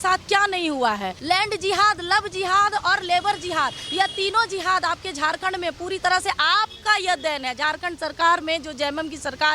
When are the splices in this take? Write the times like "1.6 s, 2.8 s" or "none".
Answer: 1.1 s